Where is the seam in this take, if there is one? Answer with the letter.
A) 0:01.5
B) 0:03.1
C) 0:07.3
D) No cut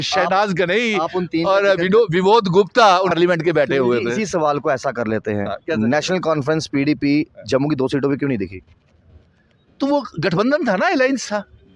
B